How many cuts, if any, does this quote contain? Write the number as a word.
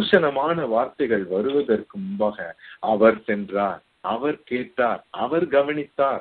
zero